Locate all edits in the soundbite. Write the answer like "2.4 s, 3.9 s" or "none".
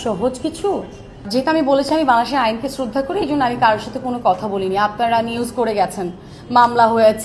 1.3 s